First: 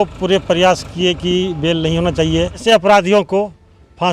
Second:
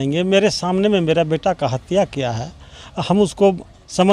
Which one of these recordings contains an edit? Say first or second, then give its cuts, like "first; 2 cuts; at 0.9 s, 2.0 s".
first; 1 cut; at 2.6 s